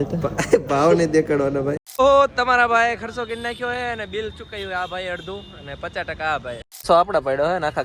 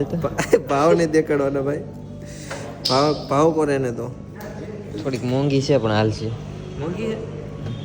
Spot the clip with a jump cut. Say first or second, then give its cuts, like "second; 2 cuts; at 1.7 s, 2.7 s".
first; 2 cuts; at 1.8 s, 6.7 s